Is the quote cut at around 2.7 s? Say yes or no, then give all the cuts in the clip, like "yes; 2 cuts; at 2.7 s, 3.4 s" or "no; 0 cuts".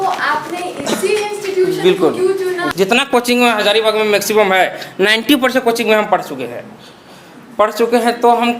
yes; 1 cut; at 2.7 s